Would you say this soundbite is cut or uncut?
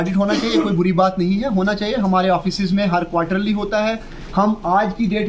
uncut